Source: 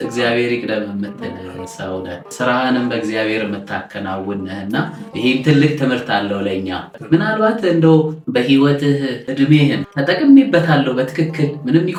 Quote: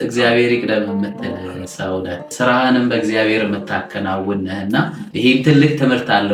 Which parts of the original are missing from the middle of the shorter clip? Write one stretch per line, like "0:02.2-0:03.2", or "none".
none